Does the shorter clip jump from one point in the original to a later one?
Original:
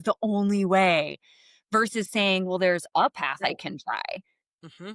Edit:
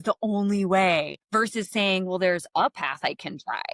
yes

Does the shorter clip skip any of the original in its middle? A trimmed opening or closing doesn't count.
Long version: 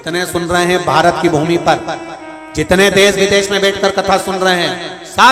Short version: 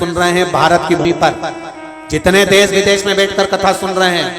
yes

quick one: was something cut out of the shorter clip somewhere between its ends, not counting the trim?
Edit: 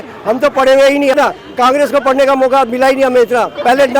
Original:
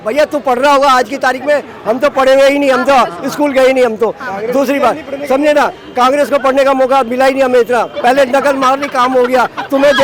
yes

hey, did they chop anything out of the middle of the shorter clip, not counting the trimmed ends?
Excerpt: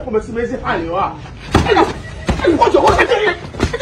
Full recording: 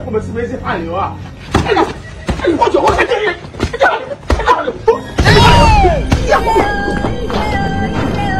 no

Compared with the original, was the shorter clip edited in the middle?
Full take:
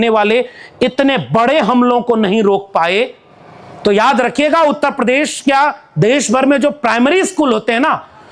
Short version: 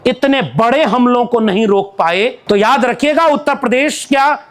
yes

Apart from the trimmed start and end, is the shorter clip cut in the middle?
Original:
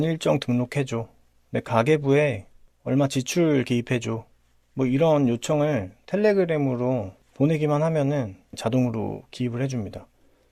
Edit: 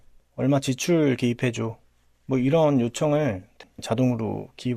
yes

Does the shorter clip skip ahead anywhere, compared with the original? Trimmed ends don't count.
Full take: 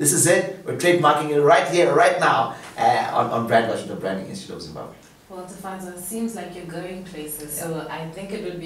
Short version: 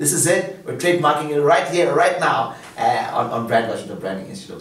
no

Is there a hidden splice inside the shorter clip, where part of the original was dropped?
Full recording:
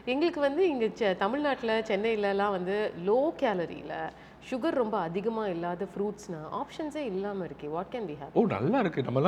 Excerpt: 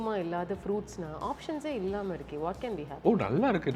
no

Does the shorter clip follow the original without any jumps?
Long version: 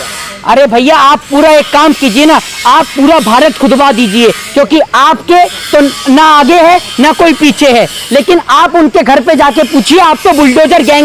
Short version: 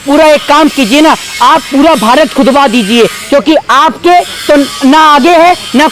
yes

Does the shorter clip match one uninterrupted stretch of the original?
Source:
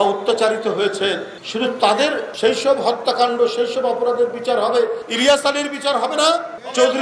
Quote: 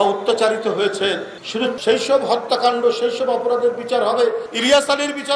no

